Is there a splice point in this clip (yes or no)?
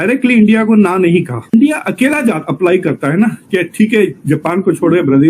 yes